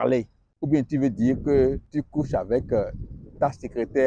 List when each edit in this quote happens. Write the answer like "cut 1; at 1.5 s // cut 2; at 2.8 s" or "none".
cut 1; at 1.8 s

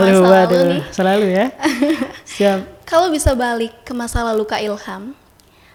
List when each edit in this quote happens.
none

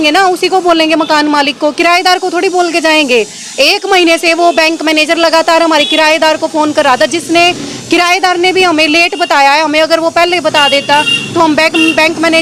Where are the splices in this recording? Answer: none

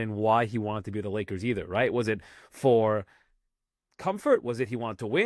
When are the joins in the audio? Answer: none

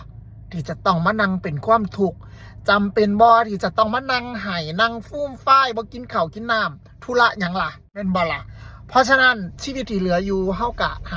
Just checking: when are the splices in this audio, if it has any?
cut 1; at 8.0 s

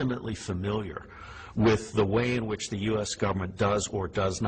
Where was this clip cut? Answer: cut 1; at 2.3 s

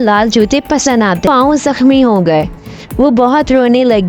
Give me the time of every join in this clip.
cut 1; at 1.2 s

